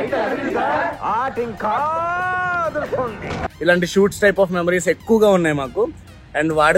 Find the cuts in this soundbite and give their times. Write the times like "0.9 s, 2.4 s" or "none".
3.5 s